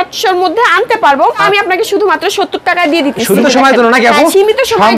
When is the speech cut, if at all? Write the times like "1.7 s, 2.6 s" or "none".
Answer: 1.4 s, 3.4 s